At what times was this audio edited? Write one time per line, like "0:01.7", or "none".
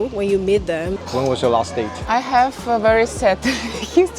0:01.0